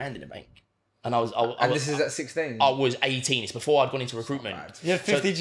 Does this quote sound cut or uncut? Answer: uncut